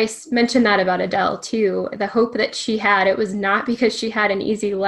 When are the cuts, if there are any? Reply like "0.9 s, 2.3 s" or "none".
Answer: none